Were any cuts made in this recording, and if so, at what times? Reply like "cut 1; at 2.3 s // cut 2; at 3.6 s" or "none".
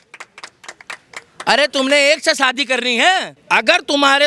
cut 1; at 3.3 s